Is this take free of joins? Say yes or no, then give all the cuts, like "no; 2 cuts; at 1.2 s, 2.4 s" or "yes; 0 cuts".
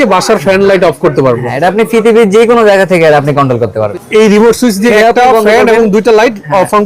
no; 2 cuts; at 3.9 s, 4.9 s